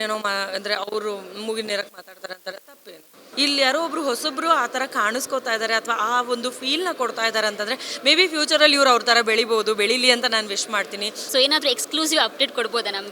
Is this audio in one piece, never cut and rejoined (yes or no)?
no